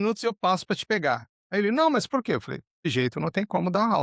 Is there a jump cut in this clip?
yes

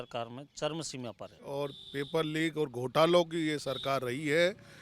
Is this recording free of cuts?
no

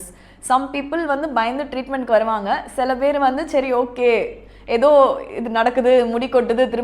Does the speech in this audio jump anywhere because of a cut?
no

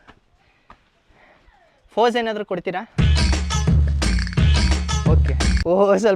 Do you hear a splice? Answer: no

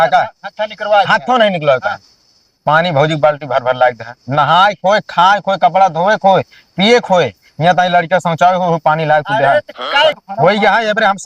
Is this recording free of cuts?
no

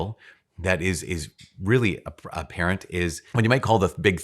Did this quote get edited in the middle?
yes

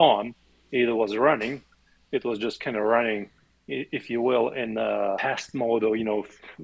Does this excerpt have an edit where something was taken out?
yes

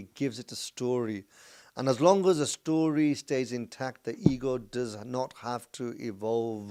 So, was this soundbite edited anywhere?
no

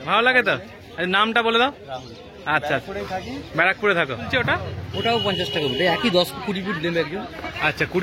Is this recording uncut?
no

